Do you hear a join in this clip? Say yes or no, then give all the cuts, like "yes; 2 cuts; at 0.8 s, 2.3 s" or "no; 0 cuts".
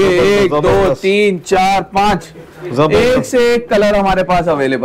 no; 0 cuts